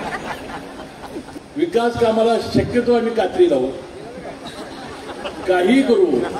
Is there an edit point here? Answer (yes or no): yes